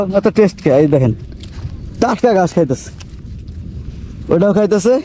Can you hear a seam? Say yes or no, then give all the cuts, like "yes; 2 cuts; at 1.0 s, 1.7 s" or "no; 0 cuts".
no; 0 cuts